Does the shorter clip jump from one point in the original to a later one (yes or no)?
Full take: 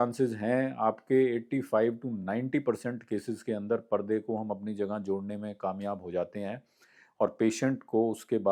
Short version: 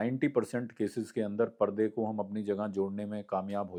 no